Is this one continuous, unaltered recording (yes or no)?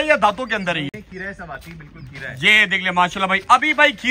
yes